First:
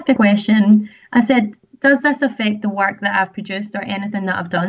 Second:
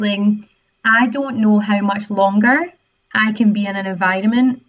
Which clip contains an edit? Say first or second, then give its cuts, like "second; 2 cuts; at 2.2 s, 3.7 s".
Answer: first; 1 cut; at 1.6 s